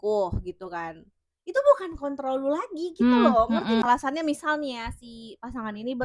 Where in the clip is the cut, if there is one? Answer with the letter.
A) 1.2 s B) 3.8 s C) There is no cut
B